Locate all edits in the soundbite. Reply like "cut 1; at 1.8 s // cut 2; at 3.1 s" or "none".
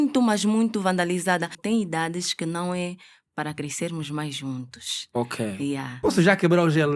cut 1; at 1.5 s // cut 2; at 5.9 s